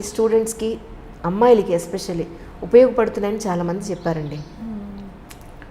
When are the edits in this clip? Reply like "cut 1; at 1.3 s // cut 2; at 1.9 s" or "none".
none

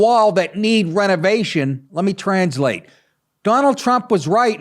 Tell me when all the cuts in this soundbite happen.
cut 1; at 1.8 s

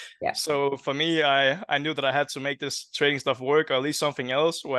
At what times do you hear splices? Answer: none

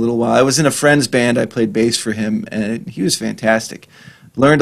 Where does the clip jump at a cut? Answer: none

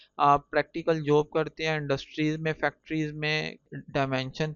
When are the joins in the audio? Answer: cut 1; at 3.6 s

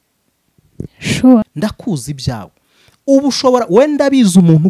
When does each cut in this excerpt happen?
cut 1; at 1.4 s

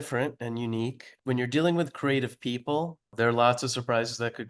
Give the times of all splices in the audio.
cut 1; at 1.1 s // cut 2; at 3.1 s

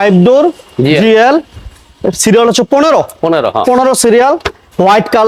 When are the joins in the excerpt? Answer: none

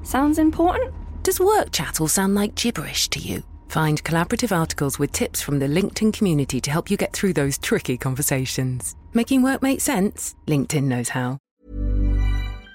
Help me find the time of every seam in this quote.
cut 1; at 11.4 s

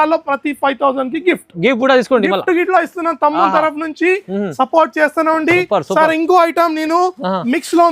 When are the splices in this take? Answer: none

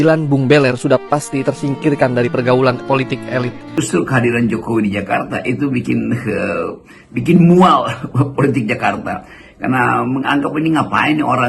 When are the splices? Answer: cut 1; at 3.8 s

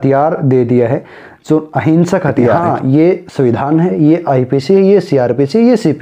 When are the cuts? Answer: cut 1; at 2.6 s

